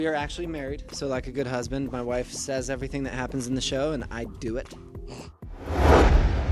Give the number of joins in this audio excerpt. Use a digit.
1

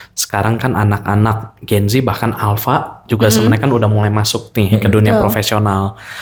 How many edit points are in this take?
0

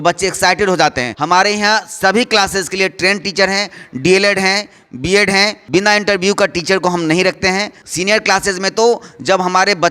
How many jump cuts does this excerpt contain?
3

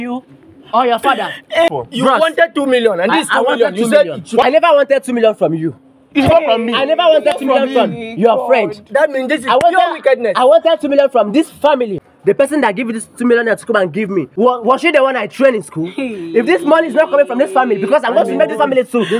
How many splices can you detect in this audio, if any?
4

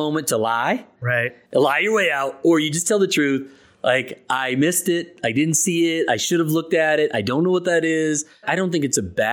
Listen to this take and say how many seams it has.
1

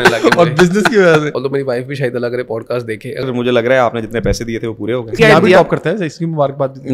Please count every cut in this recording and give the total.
3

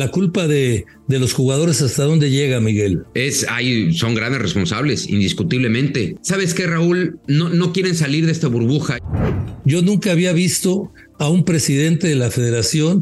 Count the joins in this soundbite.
4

